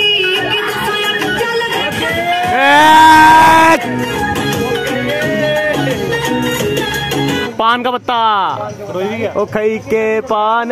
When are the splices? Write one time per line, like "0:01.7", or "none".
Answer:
0:01.8
0:04.1
0:07.5
0:09.3